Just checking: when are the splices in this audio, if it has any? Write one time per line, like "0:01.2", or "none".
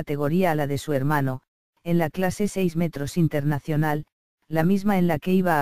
none